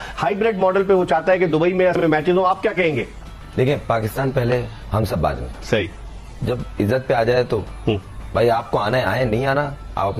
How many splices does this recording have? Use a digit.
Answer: 1